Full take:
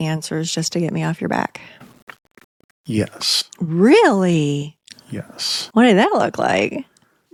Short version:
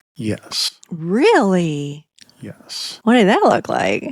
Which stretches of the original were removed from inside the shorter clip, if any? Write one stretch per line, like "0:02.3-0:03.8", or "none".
none